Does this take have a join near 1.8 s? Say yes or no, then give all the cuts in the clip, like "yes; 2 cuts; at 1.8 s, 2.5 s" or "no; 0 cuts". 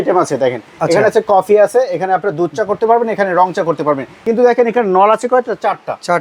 no; 1 cut; at 4.2 s